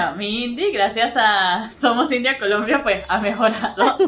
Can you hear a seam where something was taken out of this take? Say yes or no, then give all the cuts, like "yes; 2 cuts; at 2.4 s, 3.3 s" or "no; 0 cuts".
no; 0 cuts